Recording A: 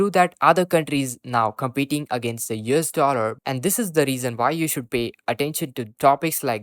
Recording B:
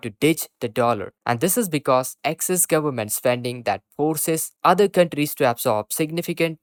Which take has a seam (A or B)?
A